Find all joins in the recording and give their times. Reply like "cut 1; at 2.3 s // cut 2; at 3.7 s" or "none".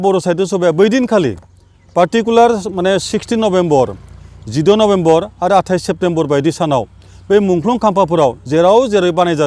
none